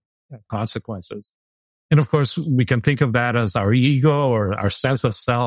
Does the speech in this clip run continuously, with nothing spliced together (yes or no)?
yes